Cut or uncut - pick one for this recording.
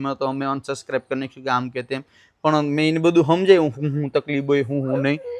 uncut